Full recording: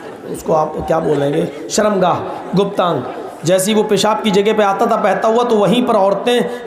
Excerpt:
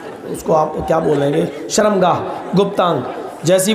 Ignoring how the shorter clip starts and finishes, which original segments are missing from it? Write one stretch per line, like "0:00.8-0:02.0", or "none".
none